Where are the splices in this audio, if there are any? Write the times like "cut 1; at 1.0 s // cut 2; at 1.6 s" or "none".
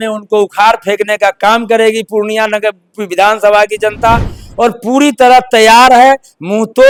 none